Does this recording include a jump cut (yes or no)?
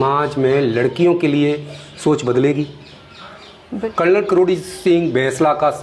yes